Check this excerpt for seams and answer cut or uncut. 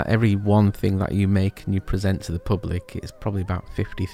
uncut